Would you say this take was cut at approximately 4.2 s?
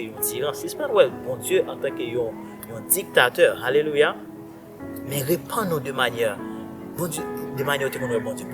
no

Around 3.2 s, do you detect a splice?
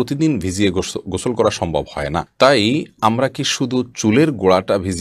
no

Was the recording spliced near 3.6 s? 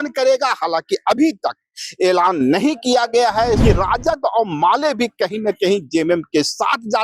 yes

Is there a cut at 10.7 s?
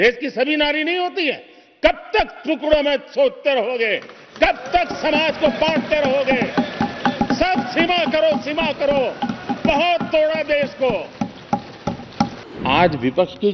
no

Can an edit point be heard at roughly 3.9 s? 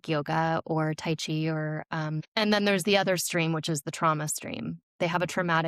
no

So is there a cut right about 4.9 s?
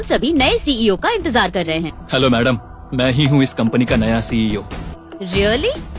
yes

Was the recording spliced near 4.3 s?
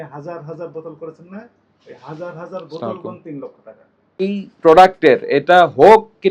yes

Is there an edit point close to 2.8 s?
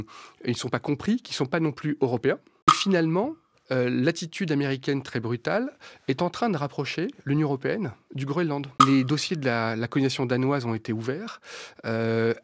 yes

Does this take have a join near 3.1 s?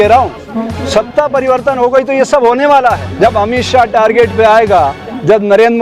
yes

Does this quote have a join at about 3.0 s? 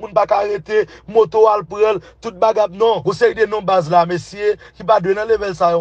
yes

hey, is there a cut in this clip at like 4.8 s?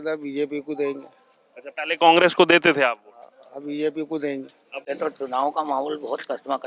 yes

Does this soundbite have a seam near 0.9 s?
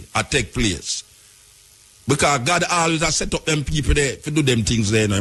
no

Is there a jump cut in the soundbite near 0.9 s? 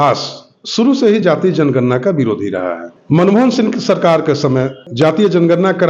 no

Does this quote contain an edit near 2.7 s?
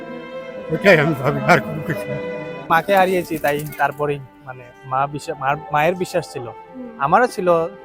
yes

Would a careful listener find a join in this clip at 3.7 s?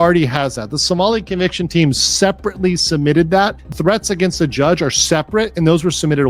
yes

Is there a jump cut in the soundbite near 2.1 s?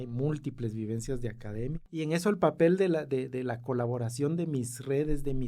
yes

